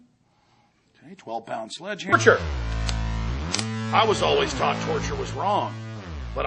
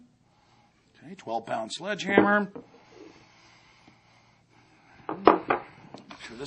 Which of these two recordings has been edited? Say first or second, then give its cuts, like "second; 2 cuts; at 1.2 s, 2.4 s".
second; 1 cut; at 2.1 s